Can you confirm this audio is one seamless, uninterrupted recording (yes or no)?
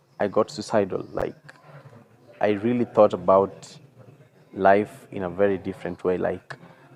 yes